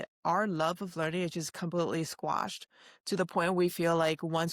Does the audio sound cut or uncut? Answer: uncut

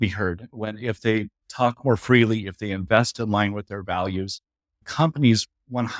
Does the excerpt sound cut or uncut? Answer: cut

